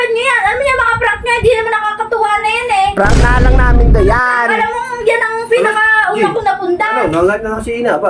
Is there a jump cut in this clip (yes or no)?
no